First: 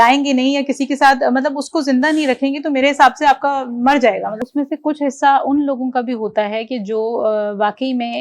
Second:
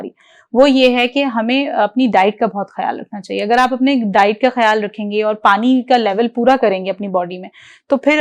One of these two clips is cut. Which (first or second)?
first